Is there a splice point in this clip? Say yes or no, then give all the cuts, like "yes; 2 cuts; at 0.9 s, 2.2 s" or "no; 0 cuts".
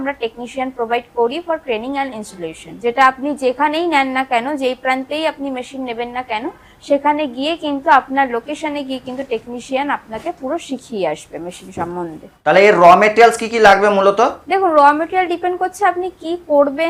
no; 0 cuts